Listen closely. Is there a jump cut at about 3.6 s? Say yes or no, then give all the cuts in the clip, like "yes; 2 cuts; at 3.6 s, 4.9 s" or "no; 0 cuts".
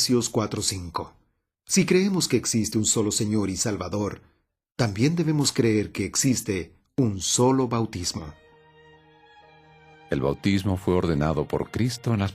yes; 1 cut; at 3.6 s